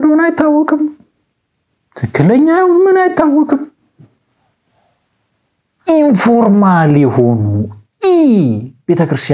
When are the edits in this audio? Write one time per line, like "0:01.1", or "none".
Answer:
none